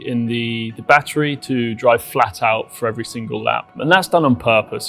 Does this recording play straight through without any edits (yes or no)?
no